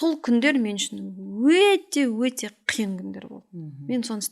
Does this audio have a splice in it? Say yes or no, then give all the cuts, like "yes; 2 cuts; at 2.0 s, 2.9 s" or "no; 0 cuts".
no; 0 cuts